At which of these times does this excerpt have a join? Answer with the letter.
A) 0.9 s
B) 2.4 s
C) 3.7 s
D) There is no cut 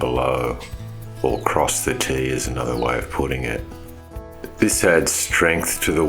D